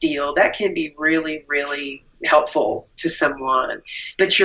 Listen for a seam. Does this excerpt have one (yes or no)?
no